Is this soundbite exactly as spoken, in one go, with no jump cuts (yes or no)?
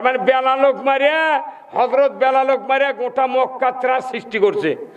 yes